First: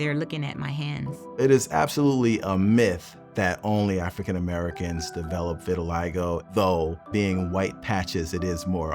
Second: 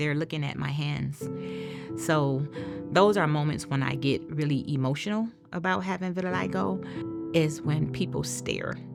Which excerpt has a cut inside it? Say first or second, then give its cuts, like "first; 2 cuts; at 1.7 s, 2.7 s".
first; 3 cuts; at 1.2 s, 6.5 s, 7.0 s